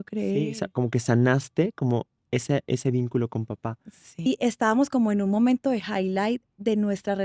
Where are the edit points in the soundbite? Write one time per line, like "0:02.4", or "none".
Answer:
0:04.3